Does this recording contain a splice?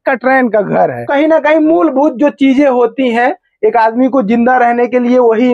yes; 1 cut; at 1.1 s

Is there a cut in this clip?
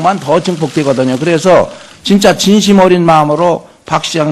yes; 1 cut; at 1.3 s

